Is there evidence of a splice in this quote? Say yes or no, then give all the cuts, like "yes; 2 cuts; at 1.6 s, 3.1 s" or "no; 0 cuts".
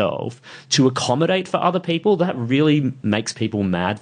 yes; 1 cut; at 2.4 s